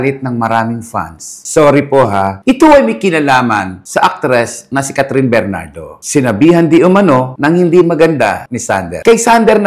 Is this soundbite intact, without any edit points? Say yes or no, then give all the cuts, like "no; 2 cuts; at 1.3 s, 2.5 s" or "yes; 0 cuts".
yes; 0 cuts